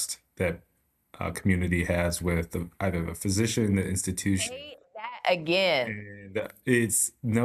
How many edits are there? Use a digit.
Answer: 0